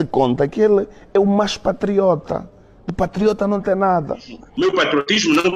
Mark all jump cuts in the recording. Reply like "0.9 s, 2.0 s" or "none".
4.4 s